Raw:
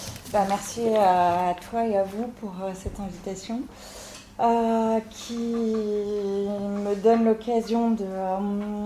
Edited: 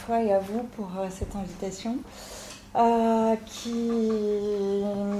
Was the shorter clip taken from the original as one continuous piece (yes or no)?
yes